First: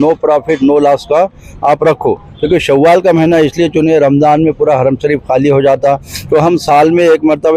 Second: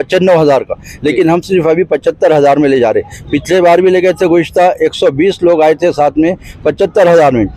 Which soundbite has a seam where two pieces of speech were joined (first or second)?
first